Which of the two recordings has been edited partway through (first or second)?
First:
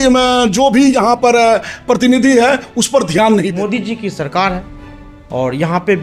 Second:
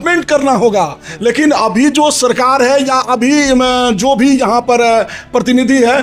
first